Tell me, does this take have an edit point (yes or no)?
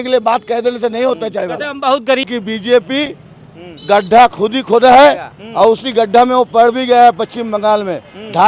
yes